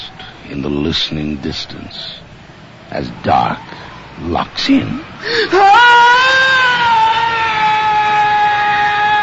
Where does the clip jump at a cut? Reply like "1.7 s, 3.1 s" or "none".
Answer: 5.3 s